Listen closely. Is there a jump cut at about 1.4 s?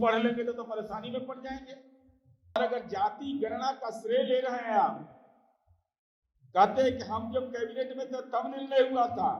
no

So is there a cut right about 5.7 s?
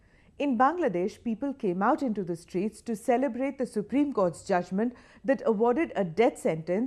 yes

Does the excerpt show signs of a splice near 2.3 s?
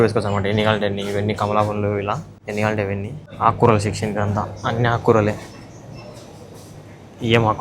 yes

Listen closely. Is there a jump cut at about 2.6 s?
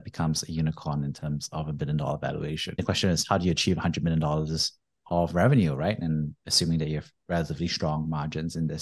yes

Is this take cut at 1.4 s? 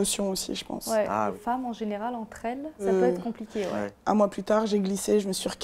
yes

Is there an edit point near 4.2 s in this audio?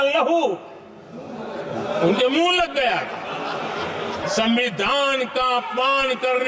yes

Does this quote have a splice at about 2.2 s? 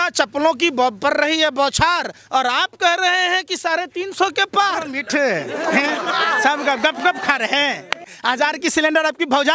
no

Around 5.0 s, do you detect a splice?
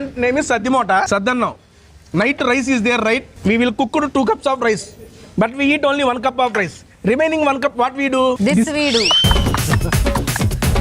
no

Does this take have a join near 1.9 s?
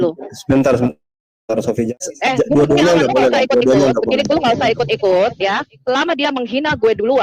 yes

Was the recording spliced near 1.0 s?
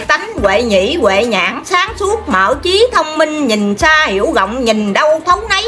no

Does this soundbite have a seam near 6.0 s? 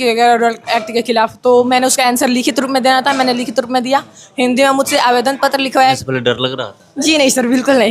yes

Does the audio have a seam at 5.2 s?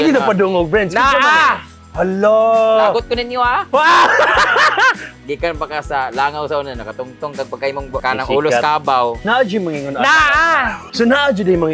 yes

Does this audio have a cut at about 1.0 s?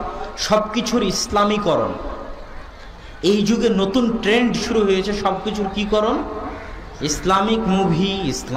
no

